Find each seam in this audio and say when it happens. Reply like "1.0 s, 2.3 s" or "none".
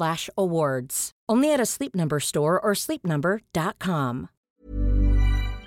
4.5 s